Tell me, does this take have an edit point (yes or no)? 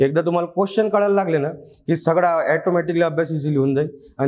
no